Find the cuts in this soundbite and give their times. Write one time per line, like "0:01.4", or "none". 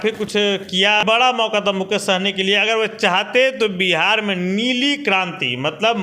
0:01.0